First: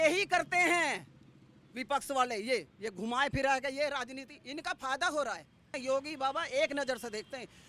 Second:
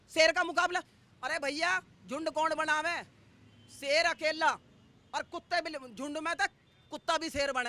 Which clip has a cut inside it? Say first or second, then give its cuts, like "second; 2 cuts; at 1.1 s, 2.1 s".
first; 1 cut; at 5.7 s